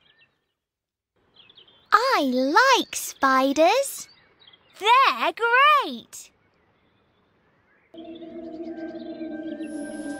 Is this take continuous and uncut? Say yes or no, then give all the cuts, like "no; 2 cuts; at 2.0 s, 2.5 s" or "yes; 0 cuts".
no; 2 cuts; at 1.2 s, 7.9 s